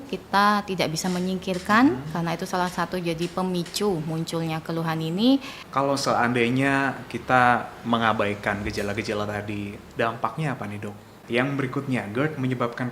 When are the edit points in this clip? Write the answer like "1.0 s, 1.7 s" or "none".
5.6 s, 11.1 s